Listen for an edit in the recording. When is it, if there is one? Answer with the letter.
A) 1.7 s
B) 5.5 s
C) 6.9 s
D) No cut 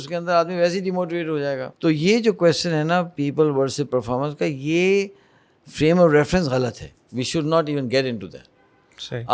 A